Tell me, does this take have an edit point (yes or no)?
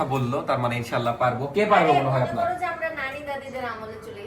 no